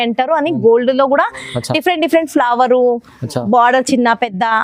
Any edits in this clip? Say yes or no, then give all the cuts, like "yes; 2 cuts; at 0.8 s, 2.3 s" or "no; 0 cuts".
no; 0 cuts